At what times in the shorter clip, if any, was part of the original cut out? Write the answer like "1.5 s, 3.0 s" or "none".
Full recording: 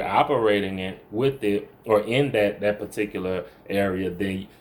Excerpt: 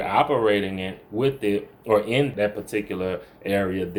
2.3 s